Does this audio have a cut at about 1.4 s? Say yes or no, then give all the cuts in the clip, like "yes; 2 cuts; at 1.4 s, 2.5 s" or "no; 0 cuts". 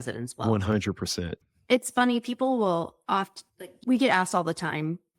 yes; 2 cuts; at 1.4 s, 3.7 s